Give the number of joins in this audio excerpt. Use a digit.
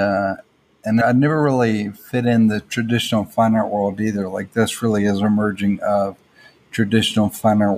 1